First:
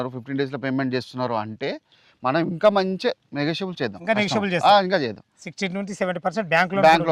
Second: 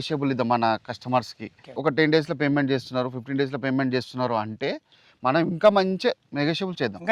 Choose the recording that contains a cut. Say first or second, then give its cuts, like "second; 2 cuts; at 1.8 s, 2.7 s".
second; 1 cut; at 1.7 s